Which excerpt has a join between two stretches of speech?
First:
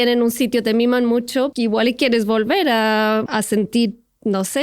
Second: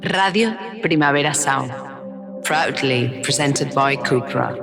first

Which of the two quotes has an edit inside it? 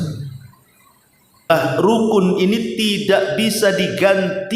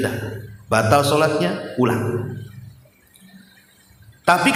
first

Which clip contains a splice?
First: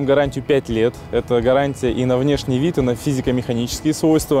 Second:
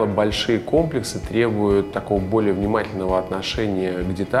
second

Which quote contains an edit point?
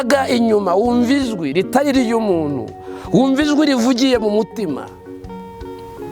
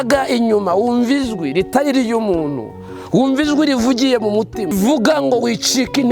second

